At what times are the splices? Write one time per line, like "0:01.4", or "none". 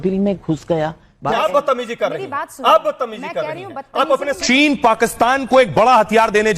0:01.4
0:04.4